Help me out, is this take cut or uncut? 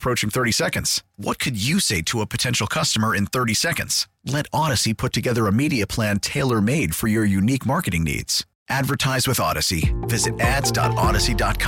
uncut